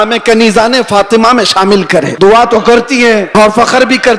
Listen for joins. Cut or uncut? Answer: cut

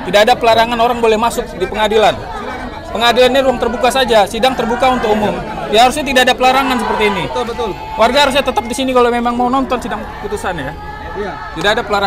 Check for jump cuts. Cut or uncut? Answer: uncut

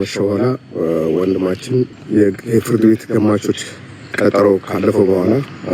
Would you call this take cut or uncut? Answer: cut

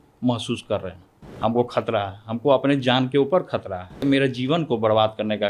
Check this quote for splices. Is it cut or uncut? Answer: cut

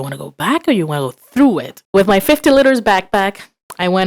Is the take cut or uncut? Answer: cut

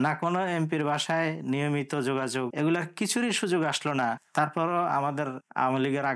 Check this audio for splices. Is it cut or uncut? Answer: cut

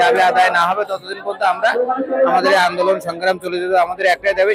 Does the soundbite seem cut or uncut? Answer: uncut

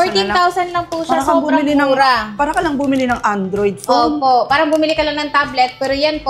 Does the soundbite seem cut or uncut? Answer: uncut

